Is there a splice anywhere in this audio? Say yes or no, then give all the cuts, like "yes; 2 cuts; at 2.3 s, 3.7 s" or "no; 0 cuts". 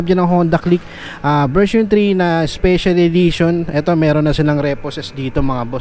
no; 0 cuts